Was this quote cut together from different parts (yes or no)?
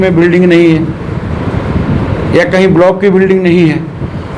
no